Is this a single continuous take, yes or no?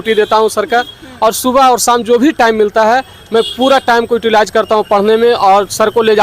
yes